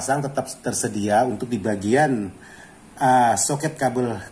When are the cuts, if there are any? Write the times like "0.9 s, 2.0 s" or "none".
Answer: none